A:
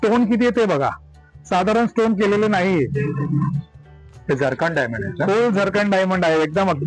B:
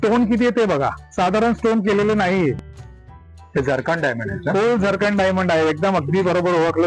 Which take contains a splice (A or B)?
B